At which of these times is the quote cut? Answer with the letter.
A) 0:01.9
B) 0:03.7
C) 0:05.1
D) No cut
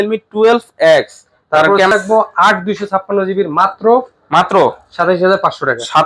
A